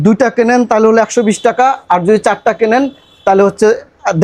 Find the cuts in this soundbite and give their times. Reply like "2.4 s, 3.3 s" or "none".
none